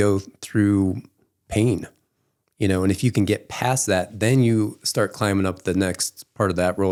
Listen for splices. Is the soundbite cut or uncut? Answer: uncut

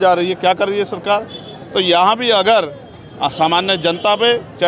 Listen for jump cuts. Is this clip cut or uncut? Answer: uncut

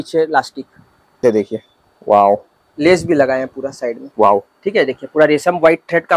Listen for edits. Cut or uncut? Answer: cut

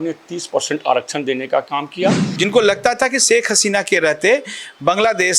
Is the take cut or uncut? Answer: cut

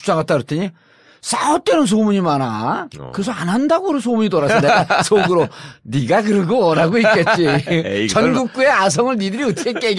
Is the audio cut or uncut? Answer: cut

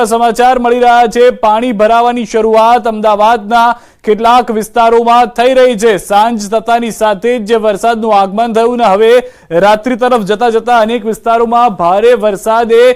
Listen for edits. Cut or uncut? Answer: uncut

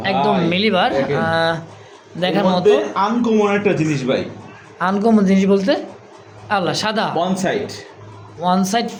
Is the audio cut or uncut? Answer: uncut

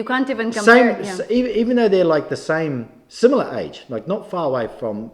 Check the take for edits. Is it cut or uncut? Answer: uncut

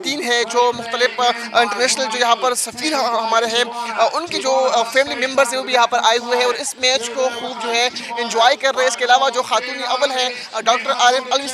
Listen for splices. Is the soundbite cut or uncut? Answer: uncut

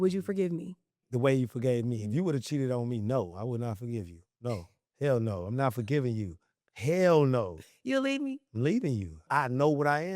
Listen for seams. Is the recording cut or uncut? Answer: cut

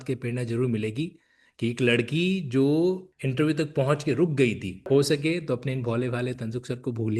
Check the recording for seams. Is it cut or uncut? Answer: cut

